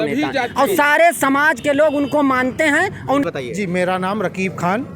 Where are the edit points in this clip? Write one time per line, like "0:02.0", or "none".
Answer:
0:03.3